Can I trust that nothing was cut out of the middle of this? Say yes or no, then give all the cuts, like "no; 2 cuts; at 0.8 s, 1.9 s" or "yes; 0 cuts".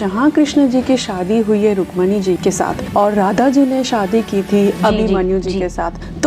no; 2 cuts; at 2.4 s, 4.8 s